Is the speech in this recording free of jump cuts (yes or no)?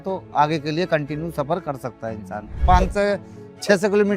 no